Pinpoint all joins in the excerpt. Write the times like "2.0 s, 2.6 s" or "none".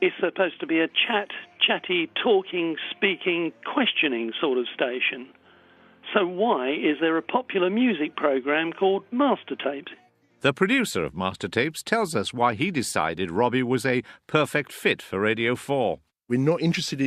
9.8 s